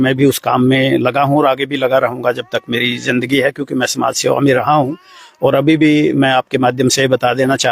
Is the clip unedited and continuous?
yes; 0 cuts

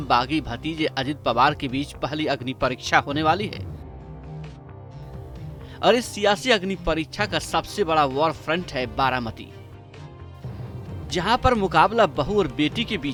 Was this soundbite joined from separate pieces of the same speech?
no; 0 cuts

